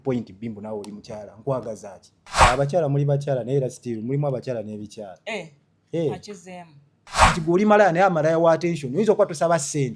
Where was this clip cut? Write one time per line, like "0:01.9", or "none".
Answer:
0:02.4
0:07.2